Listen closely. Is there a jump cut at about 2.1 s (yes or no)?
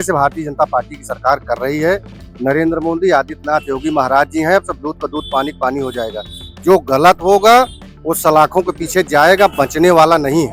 no